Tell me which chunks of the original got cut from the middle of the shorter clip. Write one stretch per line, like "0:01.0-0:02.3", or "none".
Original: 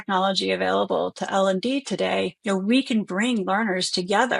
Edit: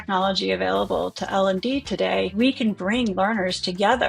0:02.3-0:02.6